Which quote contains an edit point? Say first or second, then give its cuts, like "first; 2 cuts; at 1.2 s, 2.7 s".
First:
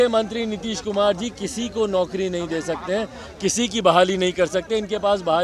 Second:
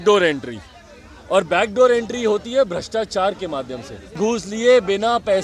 second; 1 cut; at 4.2 s